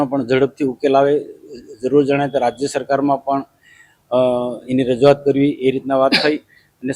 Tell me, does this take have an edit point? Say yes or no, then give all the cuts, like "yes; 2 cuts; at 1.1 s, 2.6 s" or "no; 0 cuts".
no; 0 cuts